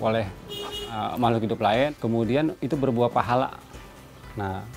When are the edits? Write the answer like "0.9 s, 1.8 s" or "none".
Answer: 1.9 s